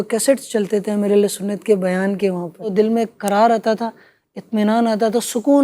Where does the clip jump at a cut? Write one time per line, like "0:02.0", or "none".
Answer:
0:02.7